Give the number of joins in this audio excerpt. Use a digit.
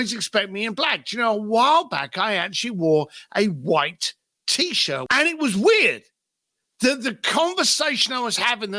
1